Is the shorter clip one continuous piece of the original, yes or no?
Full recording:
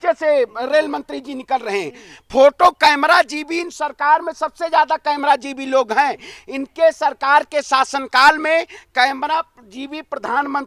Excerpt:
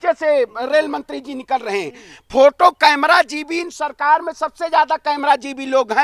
yes